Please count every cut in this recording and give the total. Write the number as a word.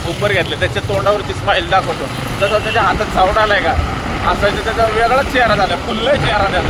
zero